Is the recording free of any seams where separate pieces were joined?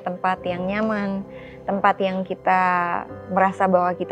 yes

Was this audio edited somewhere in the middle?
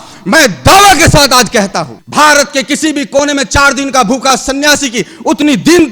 yes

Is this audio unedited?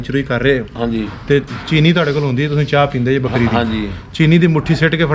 yes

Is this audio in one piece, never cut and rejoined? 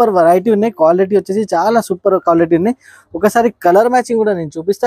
yes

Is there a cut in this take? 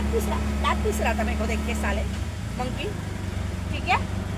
no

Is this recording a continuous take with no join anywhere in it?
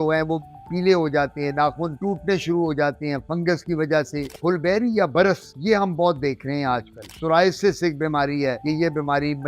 no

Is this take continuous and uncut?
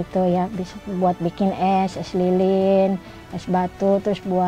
yes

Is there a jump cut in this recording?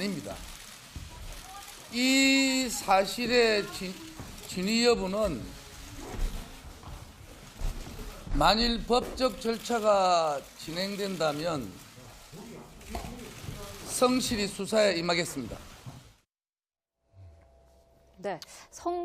yes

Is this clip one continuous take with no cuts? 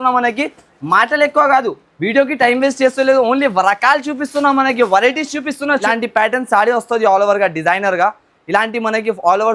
no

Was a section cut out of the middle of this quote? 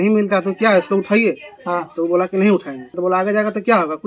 yes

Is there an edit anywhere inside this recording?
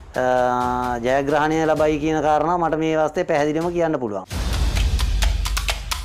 yes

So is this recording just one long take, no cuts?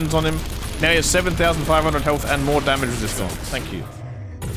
no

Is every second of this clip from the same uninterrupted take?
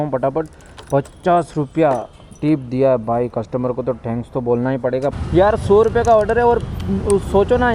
no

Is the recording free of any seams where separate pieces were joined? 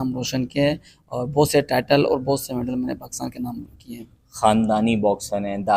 yes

